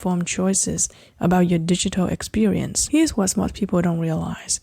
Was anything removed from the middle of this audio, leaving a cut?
yes; 1 cut; at 2.8 s

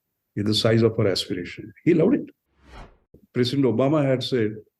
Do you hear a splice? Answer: yes; 1 cut; at 3.0 s

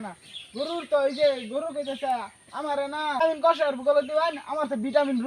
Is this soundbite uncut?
no; 1 cut; at 3.2 s

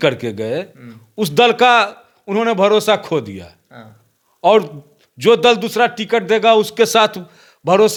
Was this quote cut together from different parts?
no; 0 cuts

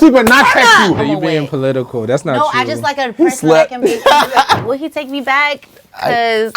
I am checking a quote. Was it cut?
yes; 2 cuts; at 1.0 s, 4.6 s

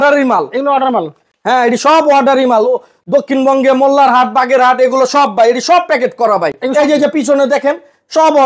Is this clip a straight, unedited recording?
yes; 0 cuts

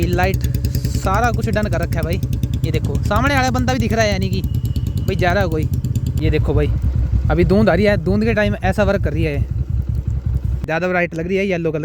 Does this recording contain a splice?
yes; 2 cuts; at 6.2 s, 10.6 s

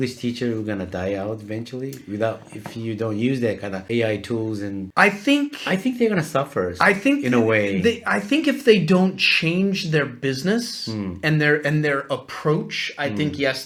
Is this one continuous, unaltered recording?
yes; 0 cuts

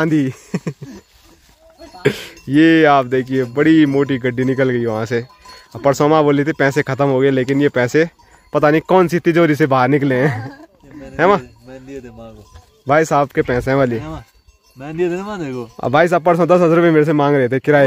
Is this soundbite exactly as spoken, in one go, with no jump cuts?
yes; 0 cuts

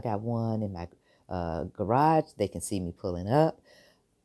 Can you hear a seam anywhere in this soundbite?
no; 0 cuts

